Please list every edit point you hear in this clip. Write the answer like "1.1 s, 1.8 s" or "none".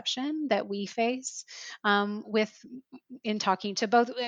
none